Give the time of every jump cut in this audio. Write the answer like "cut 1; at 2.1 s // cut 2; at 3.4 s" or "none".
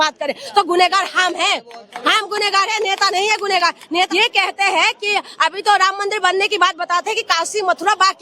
cut 1; at 4.1 s